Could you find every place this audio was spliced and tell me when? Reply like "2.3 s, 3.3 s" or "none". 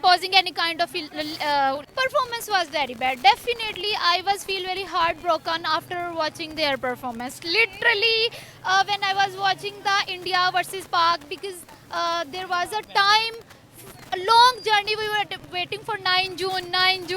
1.9 s